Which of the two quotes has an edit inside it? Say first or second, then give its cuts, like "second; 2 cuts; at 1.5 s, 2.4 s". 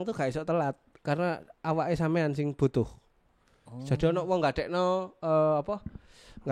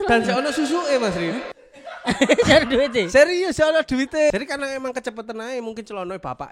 second; 1 cut; at 4.3 s